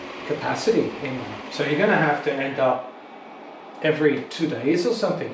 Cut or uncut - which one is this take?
uncut